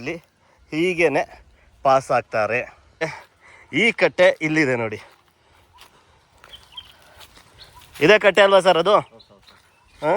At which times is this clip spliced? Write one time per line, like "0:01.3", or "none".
0:03.2